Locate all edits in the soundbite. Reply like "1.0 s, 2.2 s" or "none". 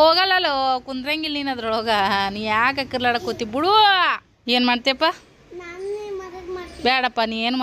4.3 s